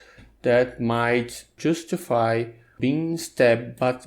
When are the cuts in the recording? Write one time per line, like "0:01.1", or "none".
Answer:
0:01.5
0:02.7